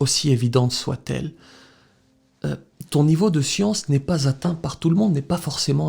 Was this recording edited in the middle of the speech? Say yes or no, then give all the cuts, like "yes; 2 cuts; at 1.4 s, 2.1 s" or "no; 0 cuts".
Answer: no; 0 cuts